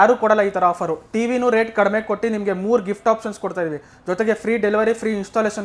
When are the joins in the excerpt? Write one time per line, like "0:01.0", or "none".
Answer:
none